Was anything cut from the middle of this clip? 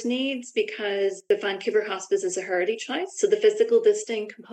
yes; 2 cuts; at 1.2 s, 3.1 s

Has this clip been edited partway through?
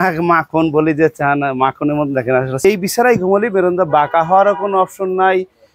yes; 1 cut; at 2.6 s

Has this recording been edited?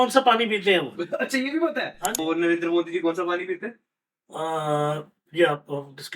yes; 1 cut; at 2.2 s

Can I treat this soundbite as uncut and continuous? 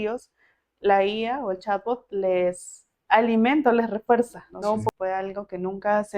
no; 1 cut; at 4.9 s

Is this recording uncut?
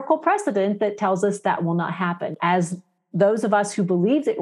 no; 1 cut; at 2.4 s

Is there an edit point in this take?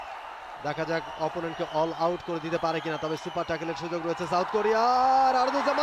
no; 0 cuts

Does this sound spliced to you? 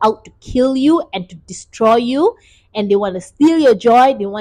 no; 0 cuts

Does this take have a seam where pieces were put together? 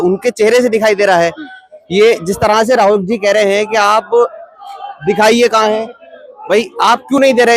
no; 0 cuts

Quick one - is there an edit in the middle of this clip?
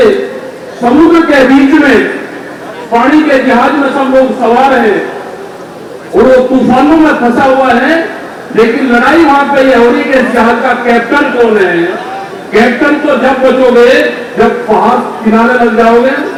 no; 0 cuts

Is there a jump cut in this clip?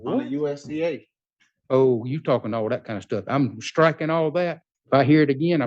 yes; 1 cut; at 4.7 s

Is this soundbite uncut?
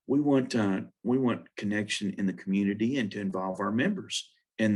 yes; 0 cuts

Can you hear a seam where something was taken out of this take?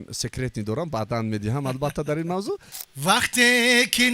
yes; 1 cut; at 2.8 s

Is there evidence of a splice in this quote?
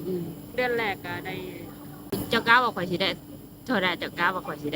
yes; 1 cut; at 2.1 s

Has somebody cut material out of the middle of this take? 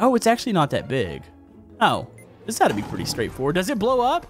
no; 0 cuts

